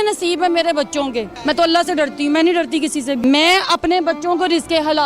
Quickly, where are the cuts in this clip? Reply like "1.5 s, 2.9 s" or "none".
1.3 s, 3.2 s